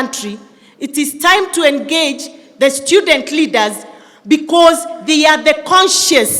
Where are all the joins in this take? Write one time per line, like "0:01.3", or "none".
none

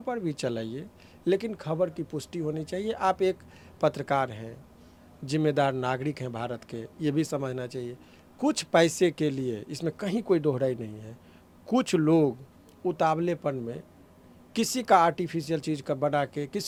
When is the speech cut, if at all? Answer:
none

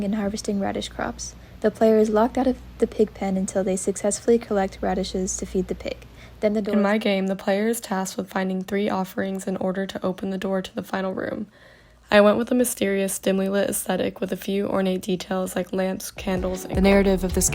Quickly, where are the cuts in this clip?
0:06.6
0:16.6

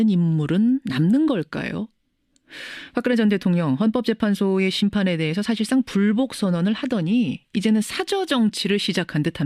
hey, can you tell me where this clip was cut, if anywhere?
none

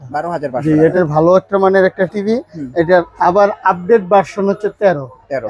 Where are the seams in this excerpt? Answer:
0:00.9

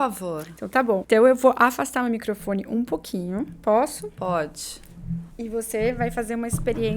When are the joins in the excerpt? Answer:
0:01.0
0:05.3

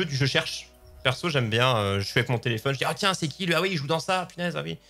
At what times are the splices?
none

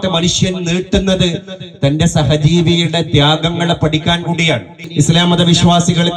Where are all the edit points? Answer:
0:04.8

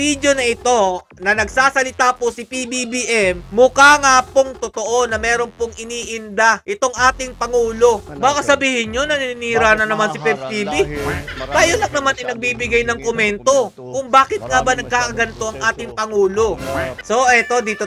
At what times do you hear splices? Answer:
0:08.1
0:17.0

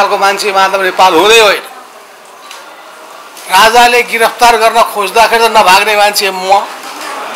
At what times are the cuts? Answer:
none

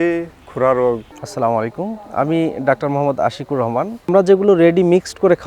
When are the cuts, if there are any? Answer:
0:01.1
0:04.1

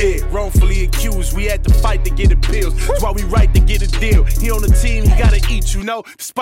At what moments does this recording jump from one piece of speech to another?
none

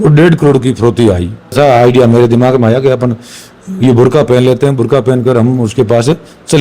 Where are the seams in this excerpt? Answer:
0:01.4

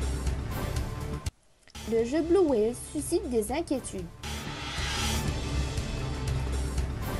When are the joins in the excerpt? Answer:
none

